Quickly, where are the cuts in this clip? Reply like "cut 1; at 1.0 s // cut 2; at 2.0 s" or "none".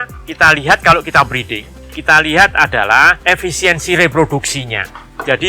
cut 1; at 3.2 s